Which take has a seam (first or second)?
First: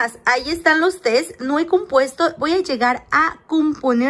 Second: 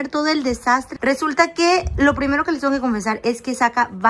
second